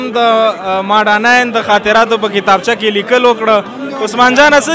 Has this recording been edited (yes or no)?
no